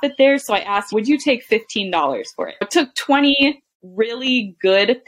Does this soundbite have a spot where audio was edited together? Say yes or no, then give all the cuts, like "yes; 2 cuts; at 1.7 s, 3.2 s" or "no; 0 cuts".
yes; 1 cut; at 2.6 s